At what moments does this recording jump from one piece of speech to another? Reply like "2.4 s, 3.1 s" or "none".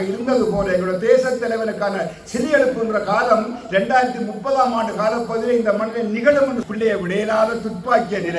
6.6 s